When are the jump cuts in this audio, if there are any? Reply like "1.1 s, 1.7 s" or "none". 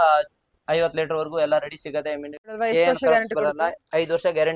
2.4 s

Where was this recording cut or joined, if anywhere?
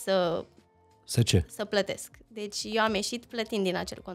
none

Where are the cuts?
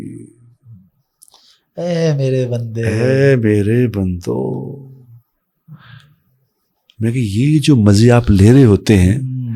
none

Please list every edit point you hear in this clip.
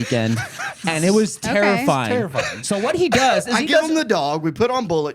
none

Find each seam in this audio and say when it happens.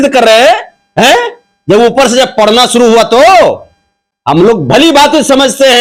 none

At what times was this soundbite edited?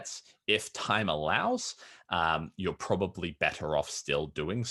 none

